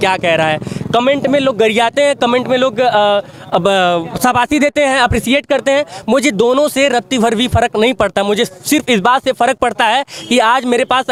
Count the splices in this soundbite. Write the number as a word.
zero